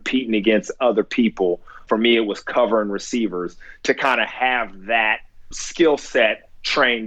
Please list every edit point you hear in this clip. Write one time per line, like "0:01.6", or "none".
0:01.8
0:05.5